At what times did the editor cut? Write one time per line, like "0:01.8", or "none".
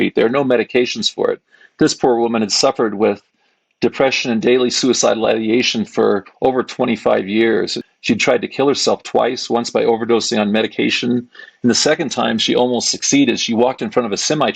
0:07.8